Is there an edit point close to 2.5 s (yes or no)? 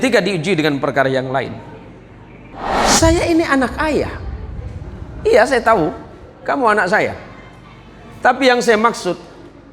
yes